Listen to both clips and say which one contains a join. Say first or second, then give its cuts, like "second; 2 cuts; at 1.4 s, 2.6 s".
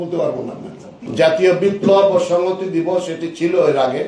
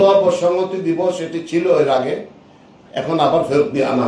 first; 1 cut; at 0.9 s